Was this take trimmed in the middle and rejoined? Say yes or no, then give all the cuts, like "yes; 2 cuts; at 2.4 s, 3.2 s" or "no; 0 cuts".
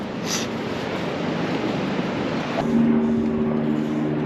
yes; 1 cut; at 2.6 s